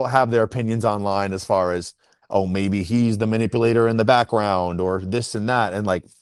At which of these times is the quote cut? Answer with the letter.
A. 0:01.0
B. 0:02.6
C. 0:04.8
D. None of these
D